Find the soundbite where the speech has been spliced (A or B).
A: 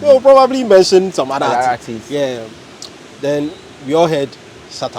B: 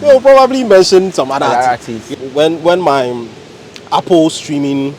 B